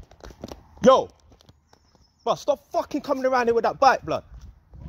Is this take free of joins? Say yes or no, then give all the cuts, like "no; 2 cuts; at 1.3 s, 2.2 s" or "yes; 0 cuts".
yes; 0 cuts